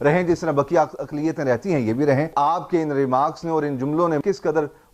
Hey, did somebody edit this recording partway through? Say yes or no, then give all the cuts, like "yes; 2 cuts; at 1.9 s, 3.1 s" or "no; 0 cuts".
yes; 2 cuts; at 2.3 s, 4.2 s